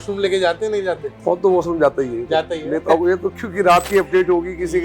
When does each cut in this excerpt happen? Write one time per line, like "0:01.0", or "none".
0:01.1